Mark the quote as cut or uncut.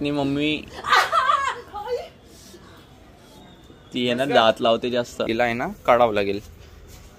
cut